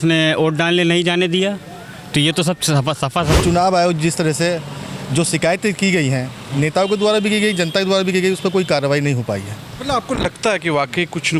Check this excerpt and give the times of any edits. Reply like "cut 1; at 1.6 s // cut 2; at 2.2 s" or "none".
cut 1; at 3.4 s